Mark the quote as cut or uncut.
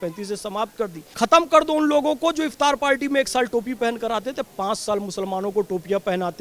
cut